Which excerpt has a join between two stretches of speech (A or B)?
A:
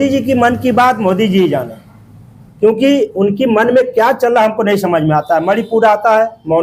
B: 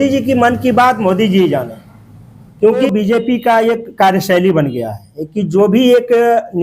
B